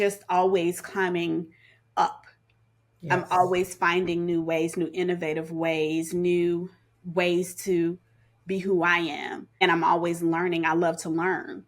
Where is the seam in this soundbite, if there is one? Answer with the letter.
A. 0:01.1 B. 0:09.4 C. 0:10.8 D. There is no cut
B